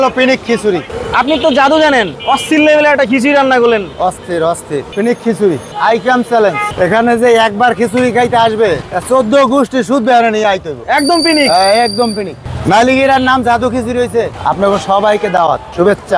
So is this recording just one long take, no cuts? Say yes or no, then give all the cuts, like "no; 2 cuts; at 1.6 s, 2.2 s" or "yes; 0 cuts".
no; 4 cuts; at 4.9 s, 6.6 s, 10.7 s, 14.3 s